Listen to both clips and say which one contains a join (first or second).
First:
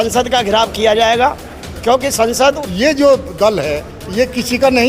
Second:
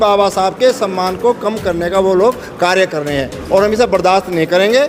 first